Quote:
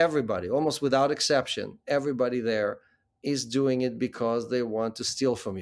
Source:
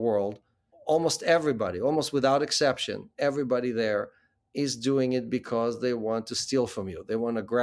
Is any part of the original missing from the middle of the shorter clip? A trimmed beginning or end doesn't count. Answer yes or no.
no